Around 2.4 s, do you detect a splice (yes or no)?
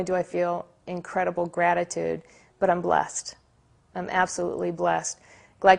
no